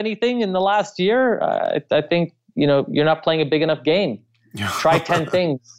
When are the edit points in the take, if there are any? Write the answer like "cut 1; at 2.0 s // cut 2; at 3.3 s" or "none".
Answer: none